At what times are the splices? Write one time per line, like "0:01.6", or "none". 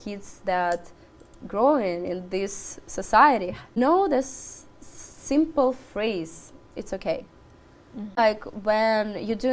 0:03.6
0:08.2

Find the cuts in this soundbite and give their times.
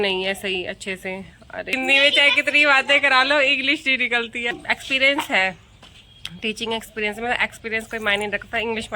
0:01.7
0:04.5

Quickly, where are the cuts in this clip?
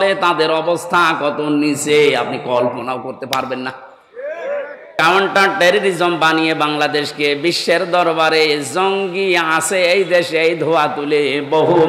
0:04.9

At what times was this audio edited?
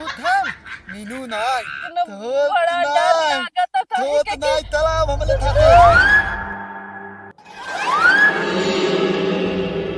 0:01.8

